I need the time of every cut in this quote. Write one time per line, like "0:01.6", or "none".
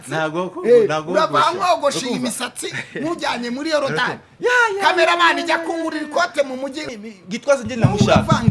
0:06.9